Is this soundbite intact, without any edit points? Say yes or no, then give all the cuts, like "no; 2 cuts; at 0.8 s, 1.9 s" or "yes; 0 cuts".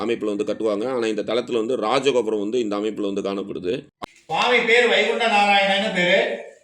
no; 1 cut; at 3.9 s